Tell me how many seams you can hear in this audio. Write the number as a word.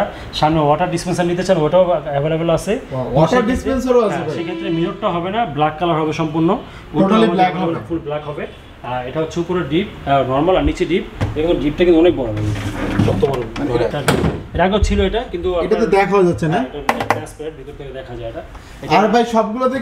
zero